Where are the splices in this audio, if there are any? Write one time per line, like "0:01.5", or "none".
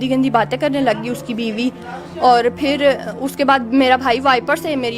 none